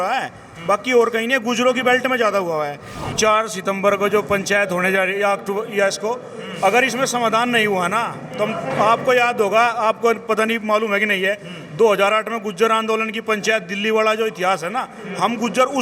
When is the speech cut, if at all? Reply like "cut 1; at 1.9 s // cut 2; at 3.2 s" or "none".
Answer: cut 1; at 3.1 s